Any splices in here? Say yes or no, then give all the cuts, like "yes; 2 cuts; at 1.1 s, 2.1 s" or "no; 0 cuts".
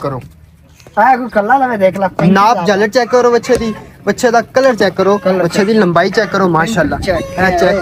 no; 0 cuts